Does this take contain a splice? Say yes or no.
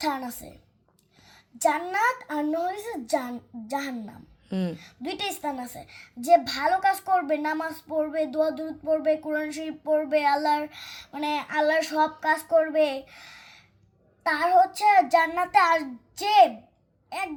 no